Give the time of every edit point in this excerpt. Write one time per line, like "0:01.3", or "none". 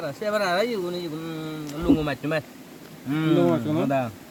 none